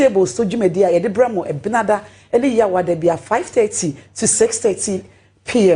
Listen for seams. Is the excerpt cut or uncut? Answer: uncut